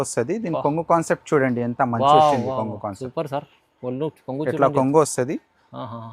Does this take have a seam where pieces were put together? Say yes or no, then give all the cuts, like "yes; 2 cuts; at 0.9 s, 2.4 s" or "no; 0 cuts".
no; 0 cuts